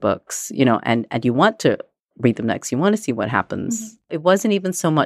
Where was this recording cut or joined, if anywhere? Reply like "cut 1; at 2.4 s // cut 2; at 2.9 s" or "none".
cut 1; at 3.9 s